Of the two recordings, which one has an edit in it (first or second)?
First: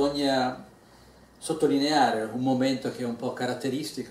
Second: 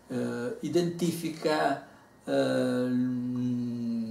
second